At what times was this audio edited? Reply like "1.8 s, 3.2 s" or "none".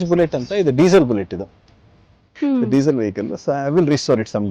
1.9 s